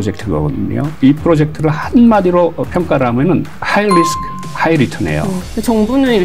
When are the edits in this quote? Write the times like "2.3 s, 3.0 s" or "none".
0.9 s, 3.6 s, 5.4 s